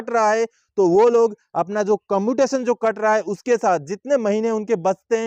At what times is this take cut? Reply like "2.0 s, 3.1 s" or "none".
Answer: none